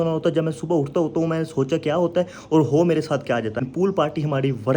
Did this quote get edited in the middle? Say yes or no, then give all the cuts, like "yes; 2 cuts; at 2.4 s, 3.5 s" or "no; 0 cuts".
yes; 1 cut; at 3.6 s